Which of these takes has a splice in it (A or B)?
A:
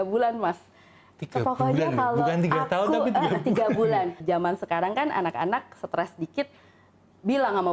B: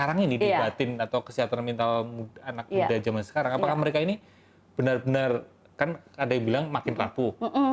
A